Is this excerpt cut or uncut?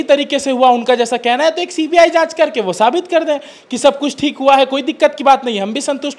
uncut